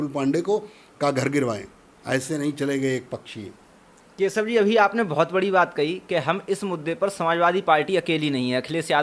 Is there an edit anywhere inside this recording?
no; 0 cuts

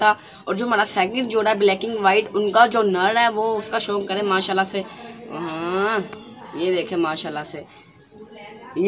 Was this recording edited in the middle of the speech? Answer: no; 0 cuts

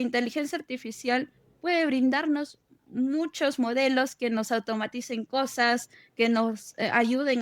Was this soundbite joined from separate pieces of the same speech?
no; 0 cuts

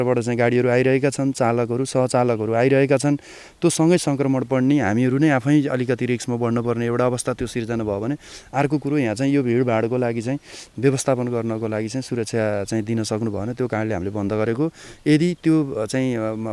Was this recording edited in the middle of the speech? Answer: no; 0 cuts

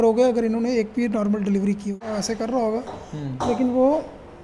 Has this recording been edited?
yes; 1 cut; at 2.1 s

